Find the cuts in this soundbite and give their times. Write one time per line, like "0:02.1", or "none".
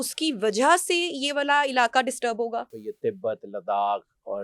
0:02.7